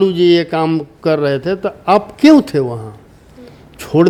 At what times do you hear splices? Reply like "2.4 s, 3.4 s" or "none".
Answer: none